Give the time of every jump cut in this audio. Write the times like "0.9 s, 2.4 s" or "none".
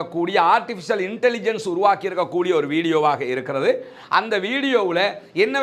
none

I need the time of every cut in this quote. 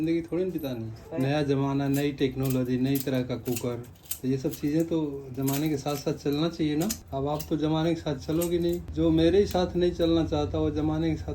1.1 s, 8.8 s

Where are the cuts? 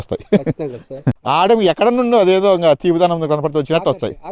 1.1 s

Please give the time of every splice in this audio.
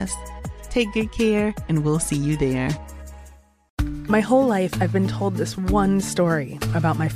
3.7 s

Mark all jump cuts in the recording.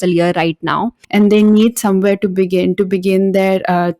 0.9 s

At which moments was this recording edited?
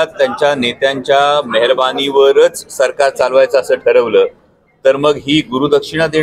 none

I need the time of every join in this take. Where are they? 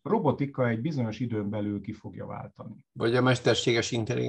none

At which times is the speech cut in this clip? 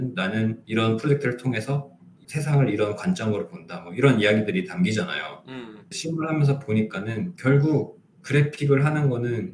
5.9 s

